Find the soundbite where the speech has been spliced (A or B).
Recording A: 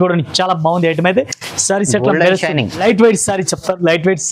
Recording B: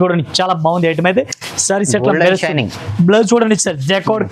A